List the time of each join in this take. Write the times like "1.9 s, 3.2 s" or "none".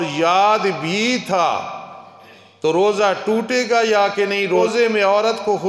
4.7 s